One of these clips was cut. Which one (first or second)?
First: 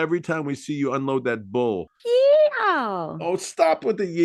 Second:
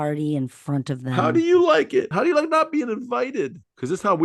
second